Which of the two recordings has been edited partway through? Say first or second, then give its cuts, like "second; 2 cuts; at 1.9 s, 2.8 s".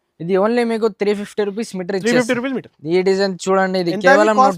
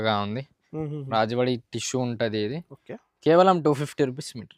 first; 1 cut; at 2.7 s